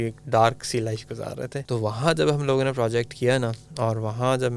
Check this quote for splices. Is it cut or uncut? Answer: cut